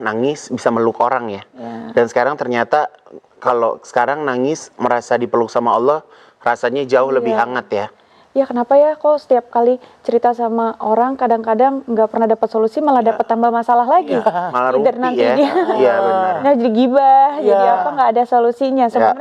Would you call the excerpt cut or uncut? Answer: uncut